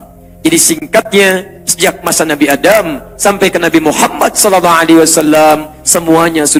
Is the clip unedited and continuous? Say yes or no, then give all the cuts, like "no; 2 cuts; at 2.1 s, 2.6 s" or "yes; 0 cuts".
yes; 0 cuts